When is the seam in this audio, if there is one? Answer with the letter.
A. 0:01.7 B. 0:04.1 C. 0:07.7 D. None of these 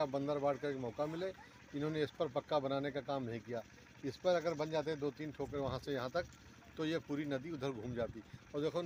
D